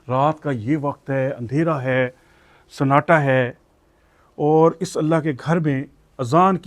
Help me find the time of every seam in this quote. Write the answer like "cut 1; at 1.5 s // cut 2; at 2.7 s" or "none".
none